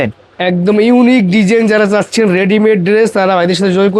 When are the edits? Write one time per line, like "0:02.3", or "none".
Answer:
none